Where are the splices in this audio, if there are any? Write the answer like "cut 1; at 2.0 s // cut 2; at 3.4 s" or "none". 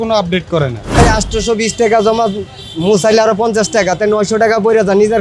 cut 1; at 1.0 s